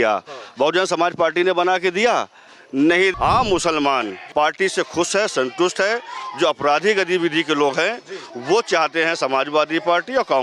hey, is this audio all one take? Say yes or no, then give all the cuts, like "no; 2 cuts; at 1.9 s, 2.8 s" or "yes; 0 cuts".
no; 2 cuts; at 3.1 s, 4.2 s